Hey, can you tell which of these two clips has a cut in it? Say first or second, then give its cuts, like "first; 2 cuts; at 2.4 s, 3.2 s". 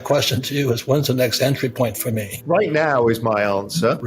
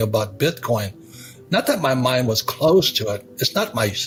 first; 1 cut; at 2.3 s